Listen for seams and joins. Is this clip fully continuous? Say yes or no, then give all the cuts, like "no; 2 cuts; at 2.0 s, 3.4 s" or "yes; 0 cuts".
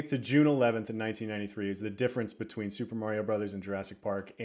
yes; 0 cuts